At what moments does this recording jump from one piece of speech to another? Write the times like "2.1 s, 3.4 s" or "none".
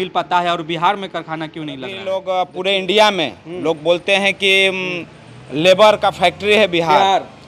2.1 s